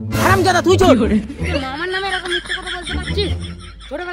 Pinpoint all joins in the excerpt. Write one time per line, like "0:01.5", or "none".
none